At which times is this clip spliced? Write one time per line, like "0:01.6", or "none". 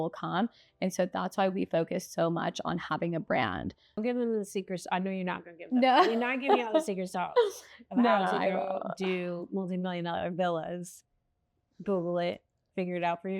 0:04.0